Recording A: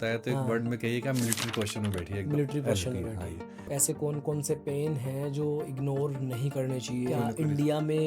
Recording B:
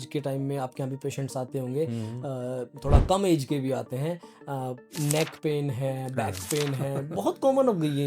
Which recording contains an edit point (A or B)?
A